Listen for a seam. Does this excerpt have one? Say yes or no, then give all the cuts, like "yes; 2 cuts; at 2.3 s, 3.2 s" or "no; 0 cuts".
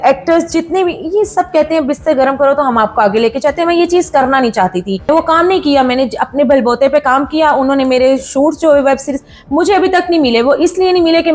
yes; 1 cut; at 5.1 s